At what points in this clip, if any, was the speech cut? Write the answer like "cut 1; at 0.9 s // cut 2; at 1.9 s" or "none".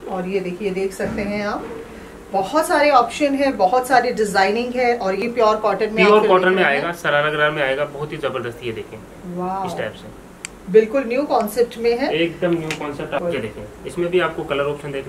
cut 1; at 5.2 s // cut 2; at 13.2 s

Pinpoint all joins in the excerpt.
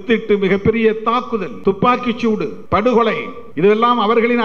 cut 1; at 1.5 s // cut 2; at 2.6 s // cut 3; at 3.4 s

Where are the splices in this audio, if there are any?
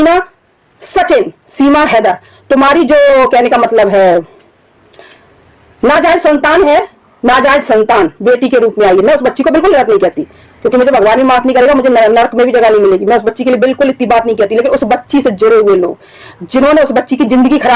none

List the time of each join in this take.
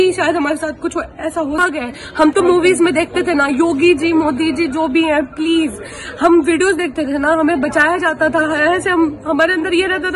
cut 1; at 1.7 s

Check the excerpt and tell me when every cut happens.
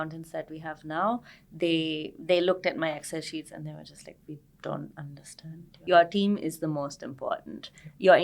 cut 1; at 5.7 s

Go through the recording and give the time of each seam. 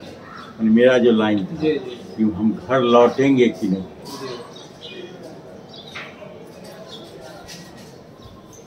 none

